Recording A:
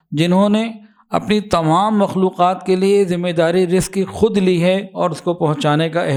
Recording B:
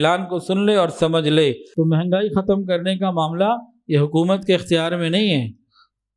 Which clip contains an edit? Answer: B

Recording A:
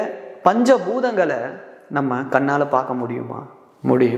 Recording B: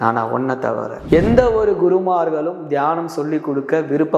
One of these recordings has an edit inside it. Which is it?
B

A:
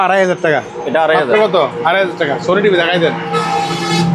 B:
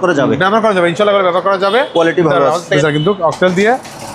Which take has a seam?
B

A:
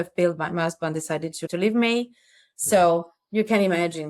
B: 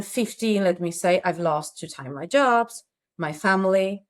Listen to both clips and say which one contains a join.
A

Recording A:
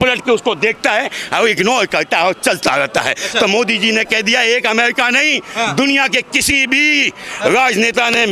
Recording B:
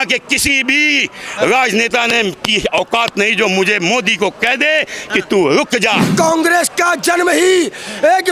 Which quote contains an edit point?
B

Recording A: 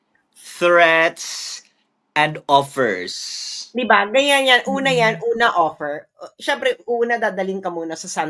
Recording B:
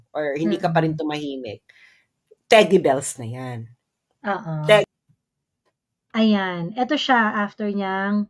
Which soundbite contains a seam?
B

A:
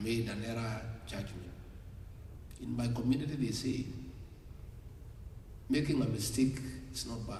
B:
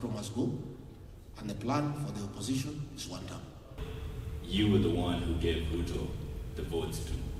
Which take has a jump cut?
B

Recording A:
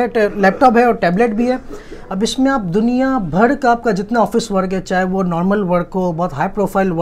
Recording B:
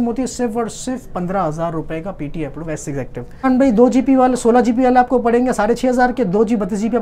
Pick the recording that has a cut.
B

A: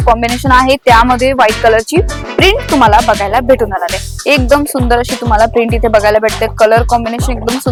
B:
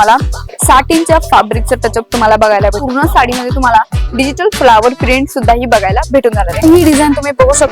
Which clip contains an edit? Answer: B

